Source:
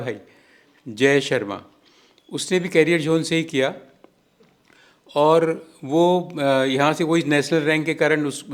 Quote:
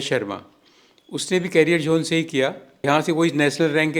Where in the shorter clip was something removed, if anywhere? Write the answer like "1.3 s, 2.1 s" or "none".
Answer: 2.8 s